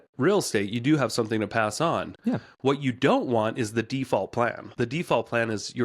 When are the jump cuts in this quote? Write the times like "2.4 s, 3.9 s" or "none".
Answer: 4.7 s

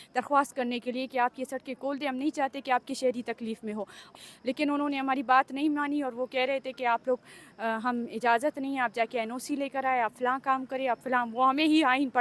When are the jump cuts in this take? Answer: 4.1 s

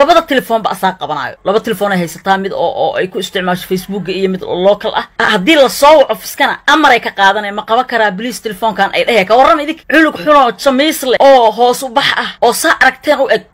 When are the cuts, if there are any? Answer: 5.1 s

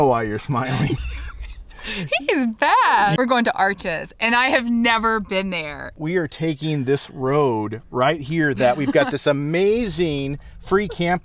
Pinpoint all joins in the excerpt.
3.1 s, 5.9 s

